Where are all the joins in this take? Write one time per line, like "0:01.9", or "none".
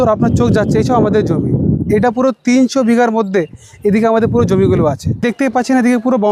none